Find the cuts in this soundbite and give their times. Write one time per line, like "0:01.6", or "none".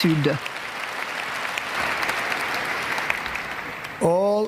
0:01.8